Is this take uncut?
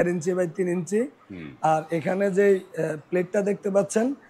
yes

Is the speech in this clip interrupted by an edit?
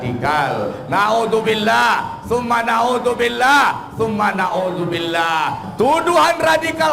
yes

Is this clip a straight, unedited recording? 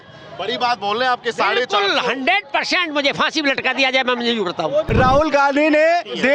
no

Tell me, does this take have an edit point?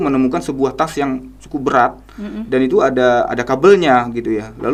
no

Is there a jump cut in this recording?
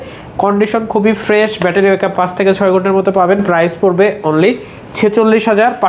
no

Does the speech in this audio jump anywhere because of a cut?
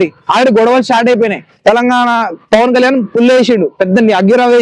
no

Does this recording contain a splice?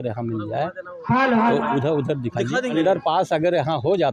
yes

